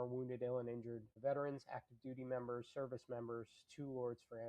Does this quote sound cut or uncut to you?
cut